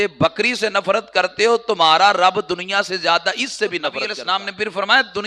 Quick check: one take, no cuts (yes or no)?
no